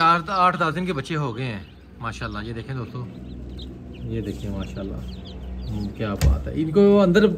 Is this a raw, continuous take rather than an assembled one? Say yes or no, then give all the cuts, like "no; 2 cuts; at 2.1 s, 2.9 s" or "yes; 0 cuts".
yes; 0 cuts